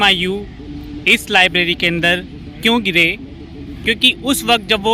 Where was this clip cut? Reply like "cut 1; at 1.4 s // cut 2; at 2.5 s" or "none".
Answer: none